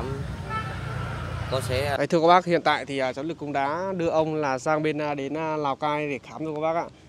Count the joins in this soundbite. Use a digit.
1